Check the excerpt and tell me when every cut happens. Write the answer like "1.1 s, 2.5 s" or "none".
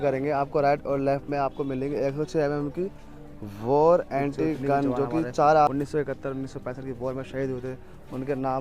5.7 s